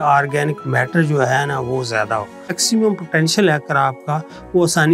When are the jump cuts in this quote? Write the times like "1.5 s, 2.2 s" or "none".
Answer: 2.6 s